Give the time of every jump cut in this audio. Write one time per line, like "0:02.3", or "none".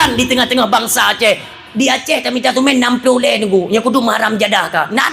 0:01.5